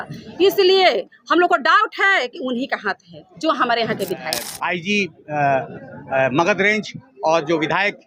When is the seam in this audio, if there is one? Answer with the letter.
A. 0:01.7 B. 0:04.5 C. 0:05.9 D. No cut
B